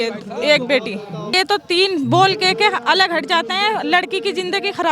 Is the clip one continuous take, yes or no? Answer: no